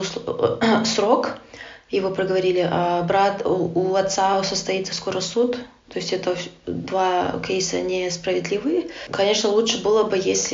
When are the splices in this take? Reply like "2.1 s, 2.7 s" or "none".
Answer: 9.0 s